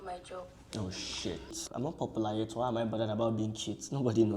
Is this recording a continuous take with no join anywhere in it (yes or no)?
no